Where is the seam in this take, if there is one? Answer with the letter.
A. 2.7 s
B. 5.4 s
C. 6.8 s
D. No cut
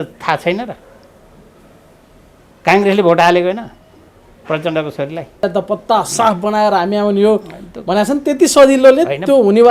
B